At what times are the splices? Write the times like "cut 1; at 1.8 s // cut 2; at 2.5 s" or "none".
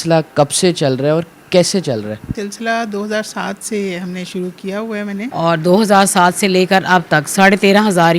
cut 1; at 2.3 s // cut 2; at 5.3 s